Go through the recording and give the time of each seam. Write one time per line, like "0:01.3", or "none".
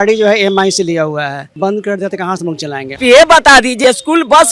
0:01.5
0:03.0
0:03.8